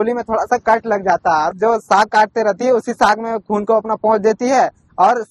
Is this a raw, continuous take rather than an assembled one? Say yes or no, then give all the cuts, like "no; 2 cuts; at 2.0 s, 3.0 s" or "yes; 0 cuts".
no; 1 cut; at 1.5 s